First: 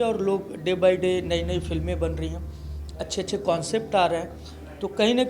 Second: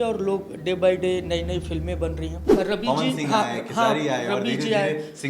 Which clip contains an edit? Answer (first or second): second